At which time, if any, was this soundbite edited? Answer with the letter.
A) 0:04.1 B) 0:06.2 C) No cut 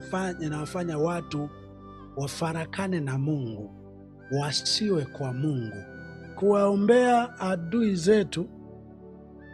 B